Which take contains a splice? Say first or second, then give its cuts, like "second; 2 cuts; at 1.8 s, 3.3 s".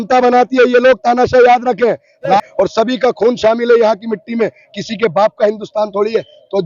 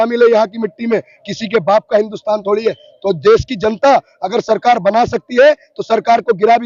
first; 1 cut; at 2.4 s